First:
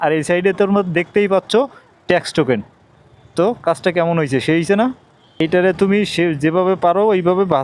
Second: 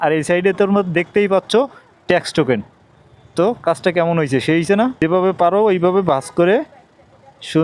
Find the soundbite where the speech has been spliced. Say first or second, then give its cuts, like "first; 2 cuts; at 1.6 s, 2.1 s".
second; 1 cut; at 5.0 s